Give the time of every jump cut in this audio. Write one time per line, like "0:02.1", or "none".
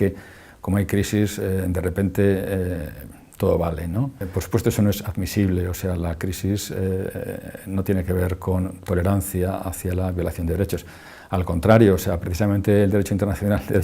0:11.5